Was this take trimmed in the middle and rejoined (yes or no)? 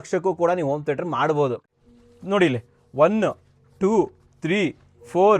yes